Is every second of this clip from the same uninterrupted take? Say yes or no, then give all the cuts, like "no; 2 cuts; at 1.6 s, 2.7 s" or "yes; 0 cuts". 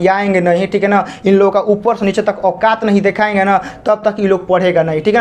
yes; 0 cuts